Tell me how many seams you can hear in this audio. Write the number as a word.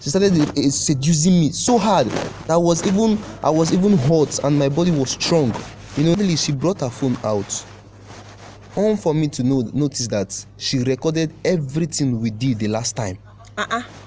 one